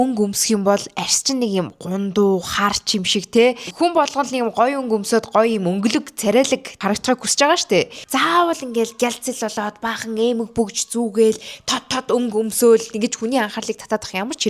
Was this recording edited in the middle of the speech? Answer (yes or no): yes